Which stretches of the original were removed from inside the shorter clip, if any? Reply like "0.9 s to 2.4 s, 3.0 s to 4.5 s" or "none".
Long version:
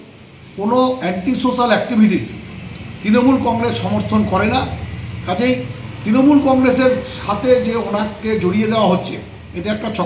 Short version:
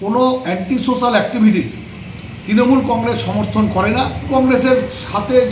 4.9 s to 6.4 s